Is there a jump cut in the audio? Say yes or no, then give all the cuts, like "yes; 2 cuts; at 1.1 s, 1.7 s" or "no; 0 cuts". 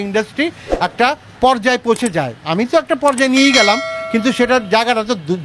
no; 0 cuts